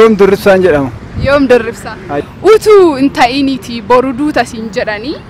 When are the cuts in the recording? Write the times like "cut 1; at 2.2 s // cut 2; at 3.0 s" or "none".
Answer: cut 1; at 2.1 s